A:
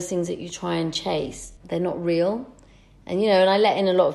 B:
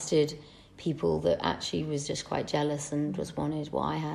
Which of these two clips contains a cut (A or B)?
A